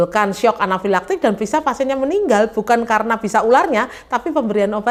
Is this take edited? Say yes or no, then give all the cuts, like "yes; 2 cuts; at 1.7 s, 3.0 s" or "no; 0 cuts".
no; 0 cuts